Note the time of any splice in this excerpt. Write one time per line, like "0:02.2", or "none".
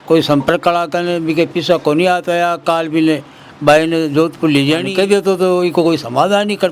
0:04.9